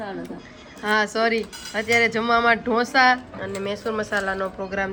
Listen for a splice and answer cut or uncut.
uncut